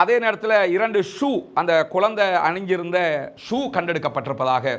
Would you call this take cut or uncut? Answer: uncut